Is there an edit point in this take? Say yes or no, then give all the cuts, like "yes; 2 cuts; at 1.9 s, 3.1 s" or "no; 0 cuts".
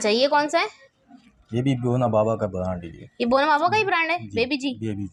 no; 0 cuts